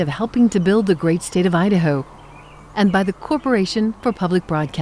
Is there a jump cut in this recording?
no; 0 cuts

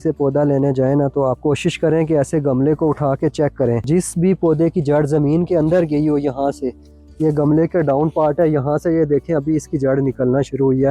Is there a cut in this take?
yes; 2 cuts; at 1.4 s, 3.8 s

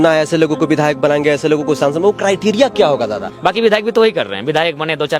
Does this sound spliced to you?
yes; 1 cut; at 3.2 s

